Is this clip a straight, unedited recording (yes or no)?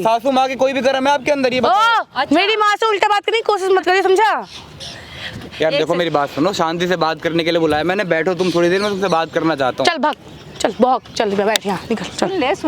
yes